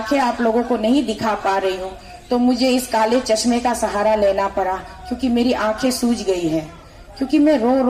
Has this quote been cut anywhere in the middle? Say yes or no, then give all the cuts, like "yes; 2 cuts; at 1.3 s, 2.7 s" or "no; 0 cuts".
no; 0 cuts